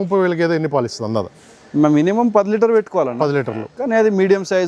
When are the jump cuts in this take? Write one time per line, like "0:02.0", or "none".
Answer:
none